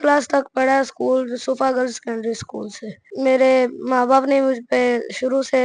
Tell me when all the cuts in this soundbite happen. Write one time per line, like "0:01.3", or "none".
0:03.1